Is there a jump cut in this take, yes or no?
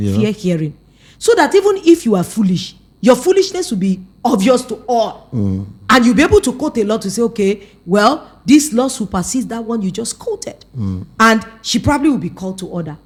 no